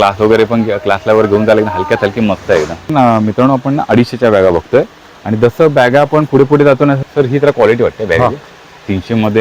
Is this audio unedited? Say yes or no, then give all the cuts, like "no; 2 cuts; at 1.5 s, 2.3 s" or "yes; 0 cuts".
no; 2 cuts; at 2.9 s, 7.0 s